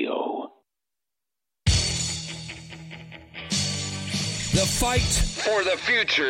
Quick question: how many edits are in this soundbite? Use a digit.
1